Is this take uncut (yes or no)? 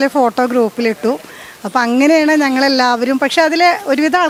yes